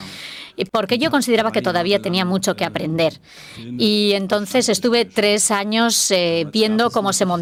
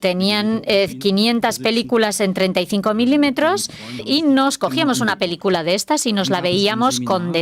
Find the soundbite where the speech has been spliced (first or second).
second